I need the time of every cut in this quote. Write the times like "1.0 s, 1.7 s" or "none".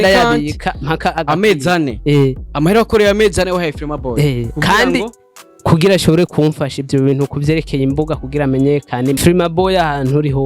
9.2 s